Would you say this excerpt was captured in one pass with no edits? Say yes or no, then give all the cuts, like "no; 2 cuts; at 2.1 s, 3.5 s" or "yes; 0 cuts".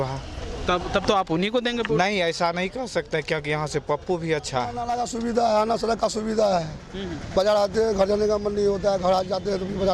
no; 1 cut; at 4.8 s